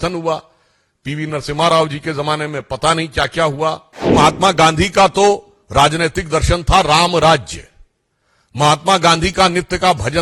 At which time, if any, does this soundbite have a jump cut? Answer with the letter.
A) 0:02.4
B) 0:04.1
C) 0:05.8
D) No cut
B